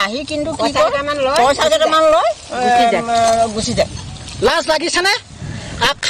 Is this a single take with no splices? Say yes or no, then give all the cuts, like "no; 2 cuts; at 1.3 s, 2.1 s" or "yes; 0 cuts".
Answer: yes; 0 cuts